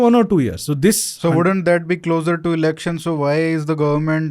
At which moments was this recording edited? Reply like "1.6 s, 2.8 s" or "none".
none